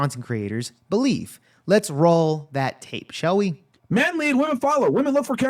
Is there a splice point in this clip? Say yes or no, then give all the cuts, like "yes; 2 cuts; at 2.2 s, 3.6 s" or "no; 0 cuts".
no; 0 cuts